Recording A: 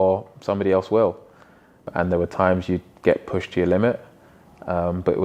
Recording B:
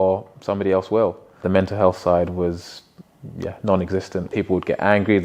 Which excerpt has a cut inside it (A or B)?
B